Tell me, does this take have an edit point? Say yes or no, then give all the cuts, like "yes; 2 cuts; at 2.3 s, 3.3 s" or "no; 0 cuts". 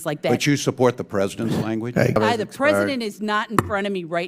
yes; 1 cut; at 2.2 s